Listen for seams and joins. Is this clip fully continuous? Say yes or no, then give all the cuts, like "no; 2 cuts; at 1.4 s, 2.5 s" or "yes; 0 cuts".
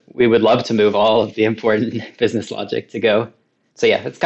yes; 0 cuts